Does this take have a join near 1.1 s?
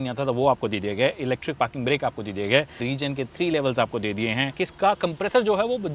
no; 2 cuts; at 2.8 s, 4.6 s

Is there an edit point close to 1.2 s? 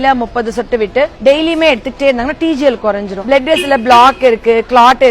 yes; 2 cuts; at 1.2 s, 3.1 s

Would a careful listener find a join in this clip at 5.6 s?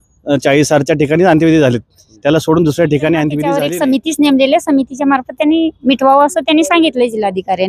no; 1 cut; at 3.6 s

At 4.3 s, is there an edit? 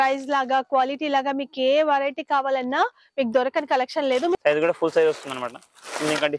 yes; 1 cut; at 4.3 s

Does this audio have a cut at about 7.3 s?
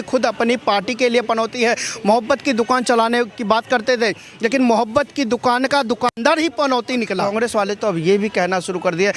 yes; 1 cut; at 7.3 s

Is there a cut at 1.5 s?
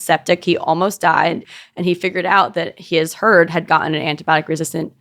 yes; 1 cut; at 1.5 s

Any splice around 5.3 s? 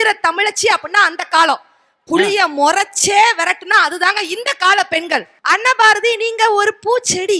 yes; 1 cut; at 5.3 s

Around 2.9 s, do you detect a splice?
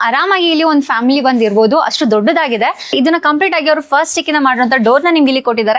yes; 1 cut; at 2.9 s

